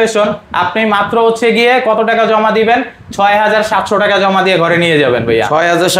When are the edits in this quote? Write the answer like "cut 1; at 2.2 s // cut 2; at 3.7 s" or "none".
none